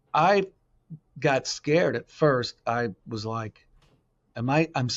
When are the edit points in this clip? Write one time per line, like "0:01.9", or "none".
none